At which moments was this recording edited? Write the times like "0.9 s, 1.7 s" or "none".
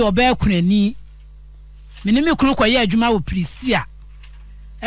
none